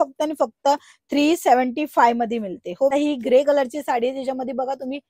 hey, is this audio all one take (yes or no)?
no